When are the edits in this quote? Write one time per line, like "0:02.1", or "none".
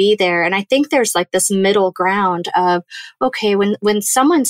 none